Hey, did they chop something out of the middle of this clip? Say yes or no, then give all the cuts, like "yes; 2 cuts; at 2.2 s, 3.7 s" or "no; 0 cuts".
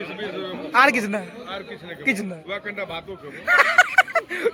no; 0 cuts